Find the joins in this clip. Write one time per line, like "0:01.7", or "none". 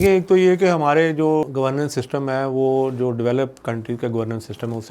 0:01.5